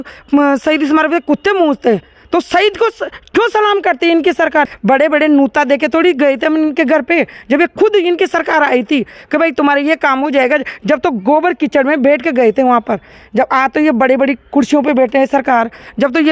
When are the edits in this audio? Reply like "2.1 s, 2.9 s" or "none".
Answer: 4.7 s

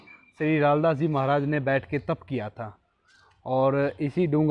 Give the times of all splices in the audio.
none

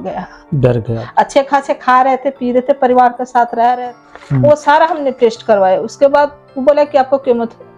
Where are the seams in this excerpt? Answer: 4.0 s

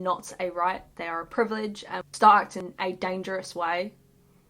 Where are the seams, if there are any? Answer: 2.0 s

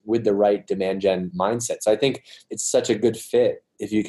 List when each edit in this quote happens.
1.3 s, 2.5 s

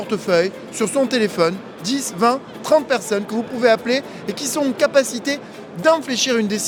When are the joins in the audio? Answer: none

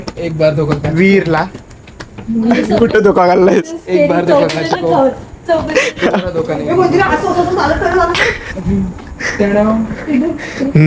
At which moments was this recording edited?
none

